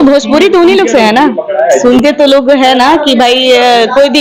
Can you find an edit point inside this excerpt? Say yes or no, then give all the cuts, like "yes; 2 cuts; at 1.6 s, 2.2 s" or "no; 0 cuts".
no; 0 cuts